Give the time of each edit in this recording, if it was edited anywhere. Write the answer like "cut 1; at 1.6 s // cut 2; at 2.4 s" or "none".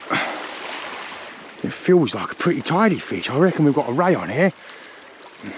none

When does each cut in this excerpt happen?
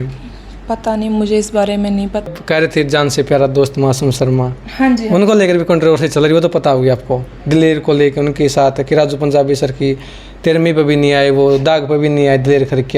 cut 1; at 2.2 s

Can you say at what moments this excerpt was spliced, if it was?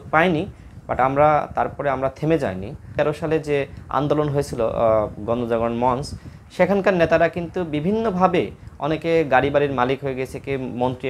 cut 1; at 2.9 s

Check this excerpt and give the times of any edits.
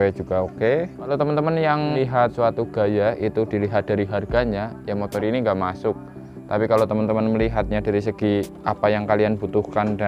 cut 1; at 1.1 s // cut 2; at 2.1 s

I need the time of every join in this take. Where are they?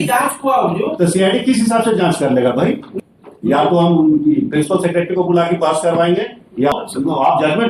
cut 1; at 2.9 s // cut 2; at 6.7 s

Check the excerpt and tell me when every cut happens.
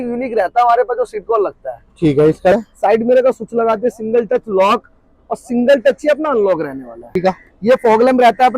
cut 1; at 2.5 s // cut 2; at 7.2 s

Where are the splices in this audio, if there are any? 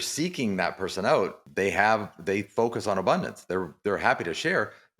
cut 1; at 1.4 s

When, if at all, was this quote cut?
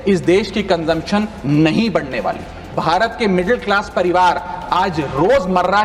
cut 1; at 2.8 s

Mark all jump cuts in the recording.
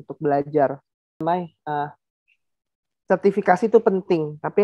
cut 1; at 1.2 s

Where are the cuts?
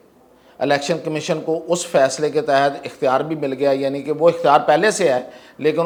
none

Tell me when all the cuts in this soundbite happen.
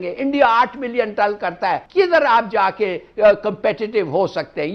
cut 1; at 1.8 s

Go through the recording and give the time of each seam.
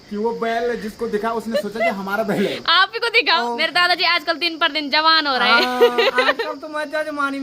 cut 1; at 3.4 s

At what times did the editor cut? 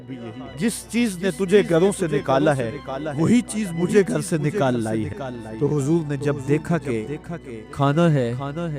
cut 1; at 5.4 s

